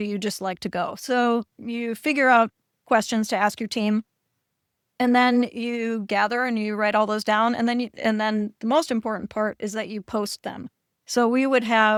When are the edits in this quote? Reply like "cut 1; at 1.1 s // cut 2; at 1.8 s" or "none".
none